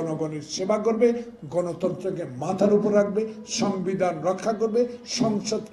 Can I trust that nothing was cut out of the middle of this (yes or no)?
yes